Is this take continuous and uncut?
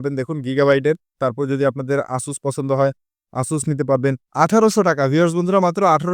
no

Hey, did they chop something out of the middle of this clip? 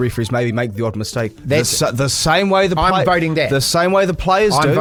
no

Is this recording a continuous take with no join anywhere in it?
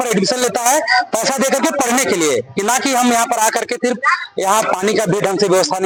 yes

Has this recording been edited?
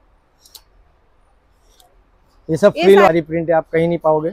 yes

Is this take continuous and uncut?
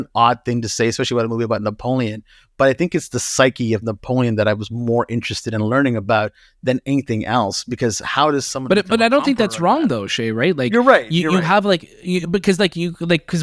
yes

